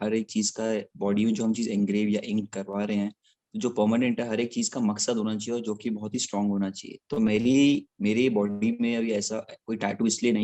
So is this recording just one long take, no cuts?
yes; 0 cuts

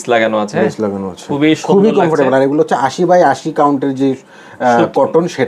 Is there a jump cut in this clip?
no; 0 cuts

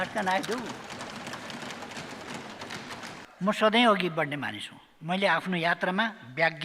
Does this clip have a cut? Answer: yes; 1 cut; at 3.2 s

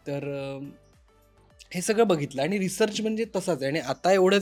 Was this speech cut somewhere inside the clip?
no; 0 cuts

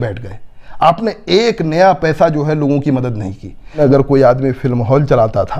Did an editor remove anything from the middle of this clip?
yes; 1 cut; at 3.7 s

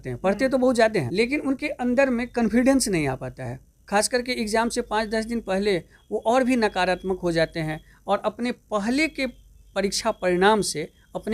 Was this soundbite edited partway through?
yes; 1 cut; at 1.1 s

